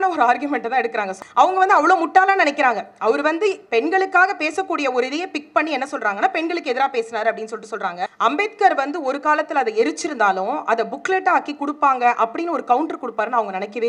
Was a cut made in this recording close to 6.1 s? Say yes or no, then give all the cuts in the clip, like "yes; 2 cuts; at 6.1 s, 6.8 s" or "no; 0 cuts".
no; 2 cuts; at 1.1 s, 8.1 s